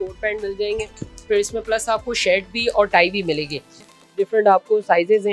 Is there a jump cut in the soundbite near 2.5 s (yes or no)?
no